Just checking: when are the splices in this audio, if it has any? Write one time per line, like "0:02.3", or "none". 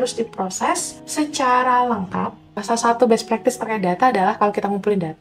0:01.0
0:02.5